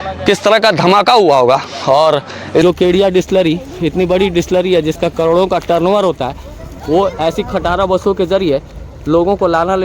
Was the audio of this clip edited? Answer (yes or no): yes